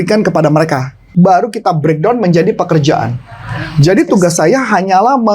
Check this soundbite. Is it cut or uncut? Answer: cut